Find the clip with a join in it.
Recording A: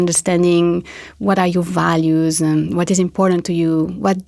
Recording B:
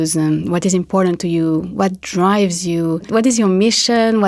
B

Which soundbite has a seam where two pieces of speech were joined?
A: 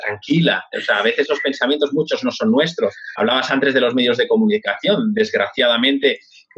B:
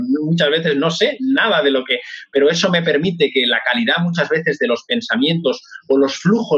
A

